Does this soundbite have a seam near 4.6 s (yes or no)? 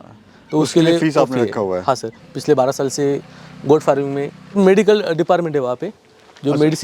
yes